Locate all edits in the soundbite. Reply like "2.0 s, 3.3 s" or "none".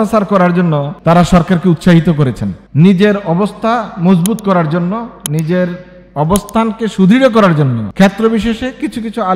0.9 s, 7.8 s